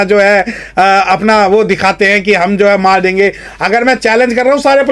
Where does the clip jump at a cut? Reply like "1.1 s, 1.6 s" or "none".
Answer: none

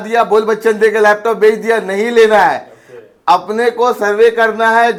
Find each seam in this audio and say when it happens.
none

